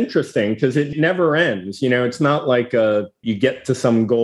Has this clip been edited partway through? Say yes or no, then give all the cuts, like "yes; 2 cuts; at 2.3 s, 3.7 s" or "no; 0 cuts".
yes; 2 cuts; at 0.9 s, 3.2 s